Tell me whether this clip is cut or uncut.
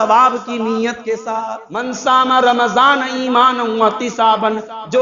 cut